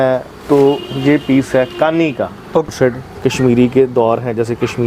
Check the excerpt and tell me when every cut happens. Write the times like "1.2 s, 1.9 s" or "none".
2.7 s